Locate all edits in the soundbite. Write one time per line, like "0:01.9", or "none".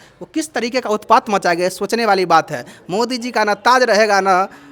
none